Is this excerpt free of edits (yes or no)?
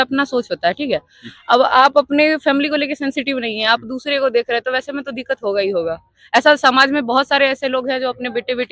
yes